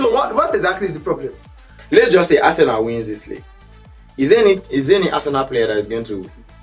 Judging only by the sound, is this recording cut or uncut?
cut